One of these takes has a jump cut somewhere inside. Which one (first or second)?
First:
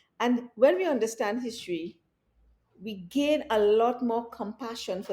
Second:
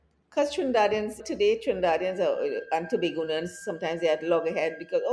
second